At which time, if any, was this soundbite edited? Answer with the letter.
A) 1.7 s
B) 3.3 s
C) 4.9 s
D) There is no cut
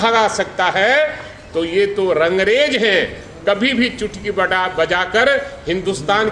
D